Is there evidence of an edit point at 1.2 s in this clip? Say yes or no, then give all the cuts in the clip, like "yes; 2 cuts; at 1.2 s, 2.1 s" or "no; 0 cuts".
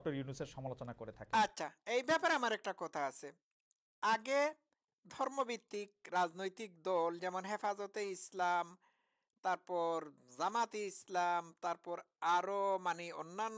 no; 0 cuts